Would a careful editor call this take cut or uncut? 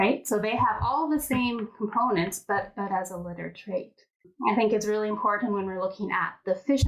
cut